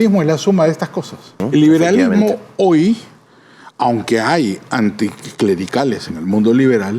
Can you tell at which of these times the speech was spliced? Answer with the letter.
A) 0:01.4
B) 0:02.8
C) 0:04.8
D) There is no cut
A